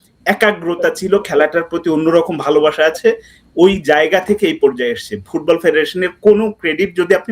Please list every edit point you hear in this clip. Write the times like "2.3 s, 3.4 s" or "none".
none